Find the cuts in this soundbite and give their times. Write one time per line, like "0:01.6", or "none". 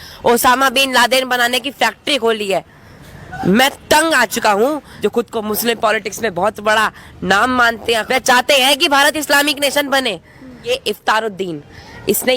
0:04.9
0:08.0
0:10.7